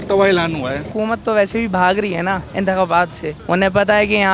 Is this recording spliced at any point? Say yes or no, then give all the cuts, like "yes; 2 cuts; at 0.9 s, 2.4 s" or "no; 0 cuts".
yes; 3 cuts; at 0.9 s, 2.5 s, 3.3 s